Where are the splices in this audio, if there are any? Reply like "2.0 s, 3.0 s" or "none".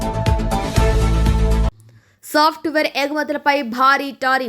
1.9 s